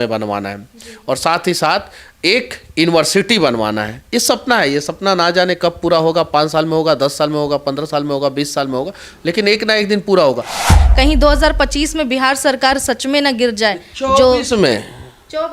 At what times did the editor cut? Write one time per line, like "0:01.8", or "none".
0:10.8